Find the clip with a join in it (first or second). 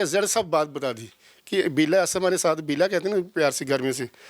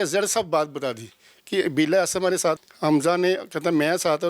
second